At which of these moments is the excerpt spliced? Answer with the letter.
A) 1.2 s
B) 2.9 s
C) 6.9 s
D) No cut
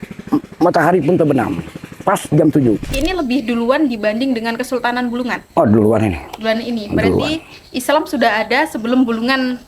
B